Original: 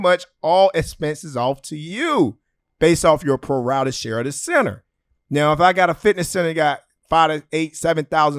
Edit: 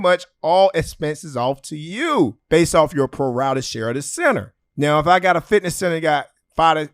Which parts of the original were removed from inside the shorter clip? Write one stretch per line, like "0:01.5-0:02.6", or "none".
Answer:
0:02.4-0:02.7
0:04.9-0:05.1